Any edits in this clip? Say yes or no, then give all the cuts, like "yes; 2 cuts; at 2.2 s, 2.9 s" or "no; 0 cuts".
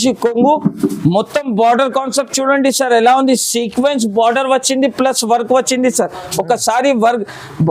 no; 0 cuts